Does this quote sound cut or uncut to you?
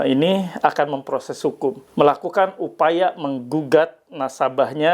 cut